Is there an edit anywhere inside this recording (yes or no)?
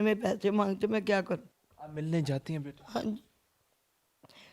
no